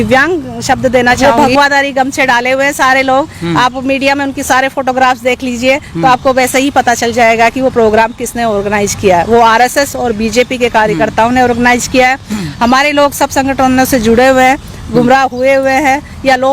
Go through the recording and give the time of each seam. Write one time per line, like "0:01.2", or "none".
0:01.2